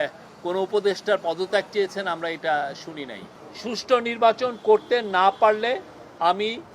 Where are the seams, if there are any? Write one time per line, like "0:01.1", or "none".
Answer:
0:03.3